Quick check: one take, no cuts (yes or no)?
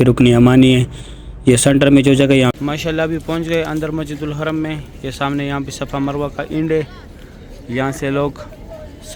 no